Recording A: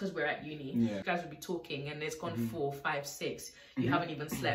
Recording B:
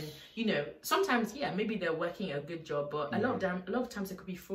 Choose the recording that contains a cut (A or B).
A